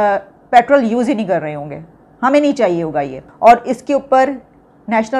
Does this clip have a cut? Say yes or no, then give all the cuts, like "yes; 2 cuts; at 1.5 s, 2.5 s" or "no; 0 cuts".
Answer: yes; 1 cut; at 3.2 s